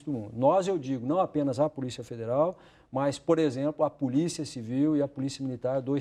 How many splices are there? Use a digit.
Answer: 0